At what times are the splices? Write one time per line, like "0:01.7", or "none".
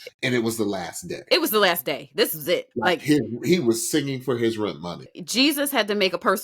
0:05.2